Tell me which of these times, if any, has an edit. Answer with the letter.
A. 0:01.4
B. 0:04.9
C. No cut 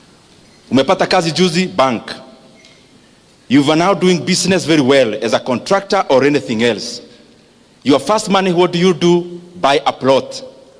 A